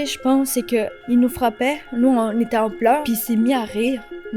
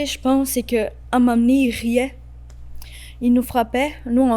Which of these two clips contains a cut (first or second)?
first